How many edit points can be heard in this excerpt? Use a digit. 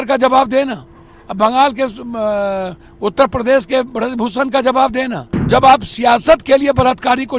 1